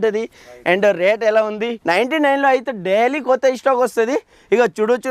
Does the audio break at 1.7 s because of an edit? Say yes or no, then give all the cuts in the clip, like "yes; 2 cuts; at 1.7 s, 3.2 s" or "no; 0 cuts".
yes; 1 cut; at 1.7 s